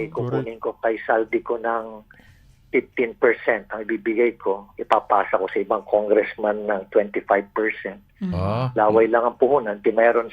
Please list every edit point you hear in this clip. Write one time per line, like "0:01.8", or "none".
none